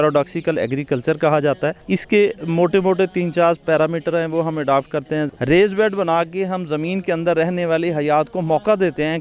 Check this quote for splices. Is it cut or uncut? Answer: cut